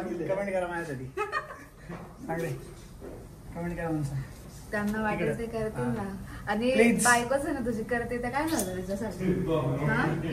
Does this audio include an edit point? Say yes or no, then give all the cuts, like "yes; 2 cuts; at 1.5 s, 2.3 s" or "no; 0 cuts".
no; 0 cuts